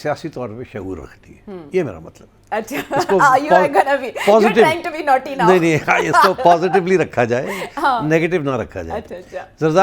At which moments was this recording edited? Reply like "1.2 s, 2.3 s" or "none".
none